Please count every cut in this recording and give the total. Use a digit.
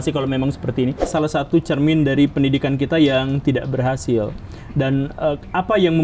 1